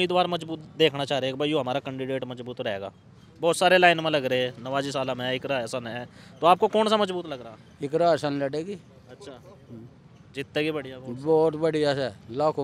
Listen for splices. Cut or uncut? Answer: uncut